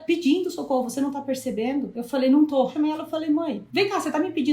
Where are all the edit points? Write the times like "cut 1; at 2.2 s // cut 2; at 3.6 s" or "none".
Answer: cut 1; at 2.0 s // cut 2; at 2.7 s // cut 3; at 3.6 s